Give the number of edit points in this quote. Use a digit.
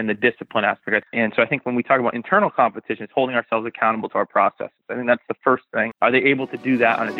2